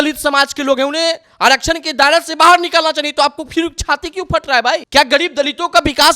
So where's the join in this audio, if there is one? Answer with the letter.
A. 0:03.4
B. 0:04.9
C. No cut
B